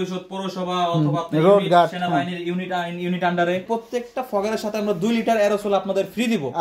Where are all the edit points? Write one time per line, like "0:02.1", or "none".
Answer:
0:03.6